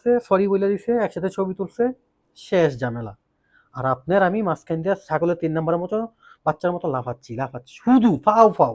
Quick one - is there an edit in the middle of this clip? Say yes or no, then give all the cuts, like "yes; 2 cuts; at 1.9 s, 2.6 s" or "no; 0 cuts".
no; 0 cuts